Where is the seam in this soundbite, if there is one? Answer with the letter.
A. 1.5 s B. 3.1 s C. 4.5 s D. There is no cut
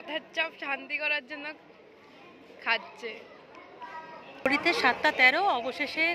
C